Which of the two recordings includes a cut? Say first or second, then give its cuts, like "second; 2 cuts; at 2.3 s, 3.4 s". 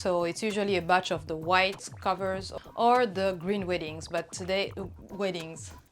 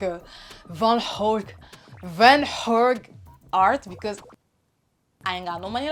first; 1 cut; at 2.5 s